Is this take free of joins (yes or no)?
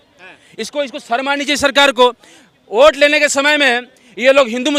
yes